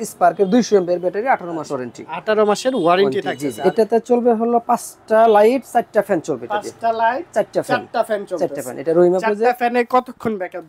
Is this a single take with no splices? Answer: no; 1 cut; at 3.5 s

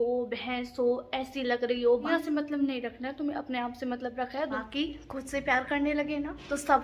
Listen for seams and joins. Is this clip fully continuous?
no; 2 cuts; at 2.1 s, 4.6 s

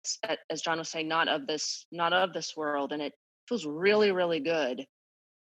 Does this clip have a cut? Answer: no; 0 cuts

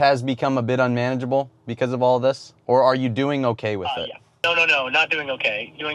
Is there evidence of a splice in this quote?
yes; 2 cuts; at 2.5 s, 4.4 s

